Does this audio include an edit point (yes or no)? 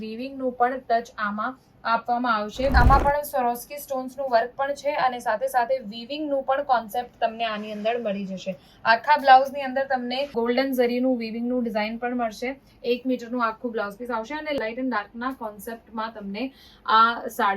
yes